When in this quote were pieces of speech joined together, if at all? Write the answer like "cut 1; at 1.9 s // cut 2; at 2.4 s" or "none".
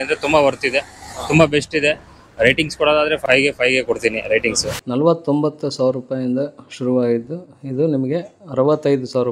cut 1; at 3.2 s // cut 2; at 4.7 s